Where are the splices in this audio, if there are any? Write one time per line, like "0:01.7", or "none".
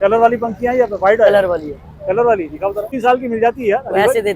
0:02.9